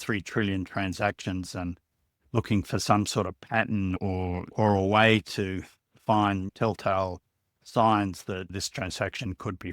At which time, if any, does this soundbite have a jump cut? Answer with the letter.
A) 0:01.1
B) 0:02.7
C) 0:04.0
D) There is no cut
C